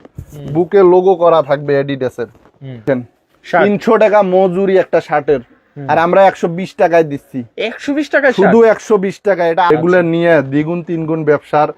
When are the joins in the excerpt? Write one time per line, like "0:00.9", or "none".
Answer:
0:02.8
0:09.7